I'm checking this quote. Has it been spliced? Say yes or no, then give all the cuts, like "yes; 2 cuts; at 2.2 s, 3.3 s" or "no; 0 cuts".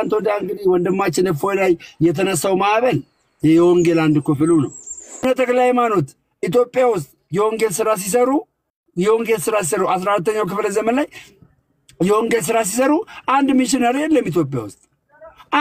yes; 1 cut; at 5.2 s